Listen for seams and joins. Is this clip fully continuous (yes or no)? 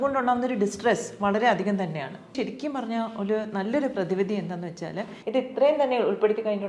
no